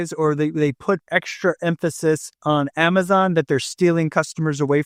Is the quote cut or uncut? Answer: uncut